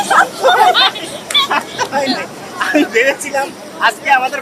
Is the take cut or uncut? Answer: uncut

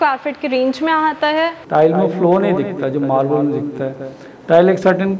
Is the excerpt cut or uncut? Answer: cut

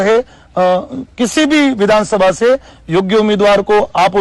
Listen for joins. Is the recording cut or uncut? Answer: uncut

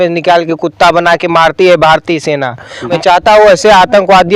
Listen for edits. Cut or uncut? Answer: cut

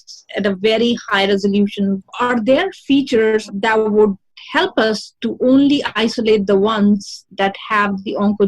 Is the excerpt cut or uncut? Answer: cut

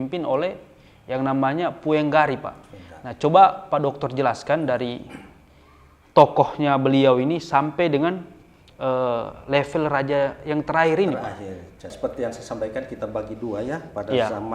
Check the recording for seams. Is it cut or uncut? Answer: cut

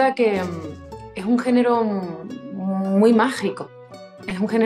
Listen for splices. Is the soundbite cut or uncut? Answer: uncut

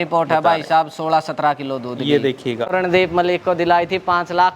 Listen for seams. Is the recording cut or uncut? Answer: cut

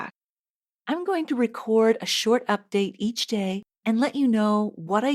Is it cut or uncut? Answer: cut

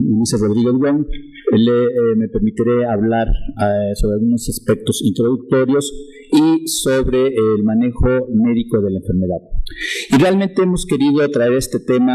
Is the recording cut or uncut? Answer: cut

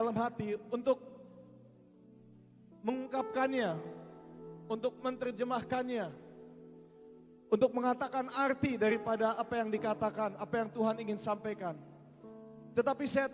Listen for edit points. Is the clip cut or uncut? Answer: uncut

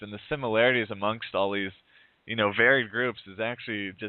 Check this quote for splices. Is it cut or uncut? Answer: cut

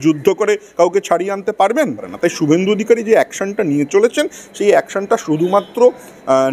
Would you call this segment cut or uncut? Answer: cut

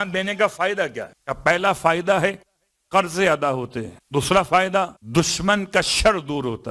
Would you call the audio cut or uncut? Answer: uncut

